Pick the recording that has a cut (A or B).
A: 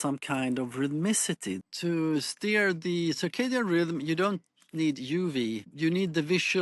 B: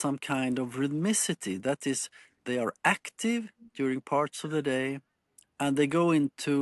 A